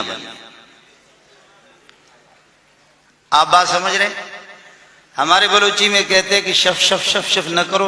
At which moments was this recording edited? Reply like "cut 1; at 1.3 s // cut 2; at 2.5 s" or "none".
none